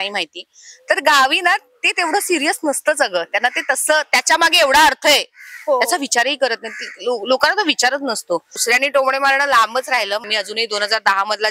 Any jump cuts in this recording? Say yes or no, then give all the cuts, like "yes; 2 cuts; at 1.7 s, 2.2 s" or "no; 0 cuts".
yes; 2 cuts; at 8.6 s, 10.2 s